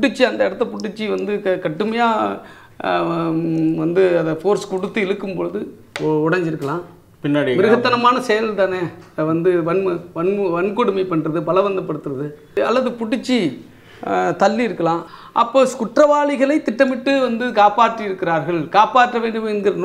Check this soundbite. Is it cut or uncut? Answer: cut